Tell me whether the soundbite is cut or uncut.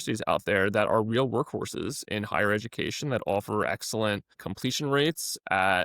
cut